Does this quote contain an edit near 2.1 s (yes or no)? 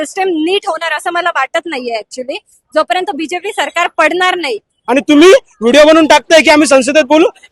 no